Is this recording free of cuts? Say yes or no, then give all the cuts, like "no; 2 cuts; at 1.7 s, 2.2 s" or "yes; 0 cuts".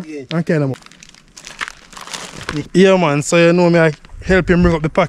no; 2 cuts; at 0.7 s, 2.7 s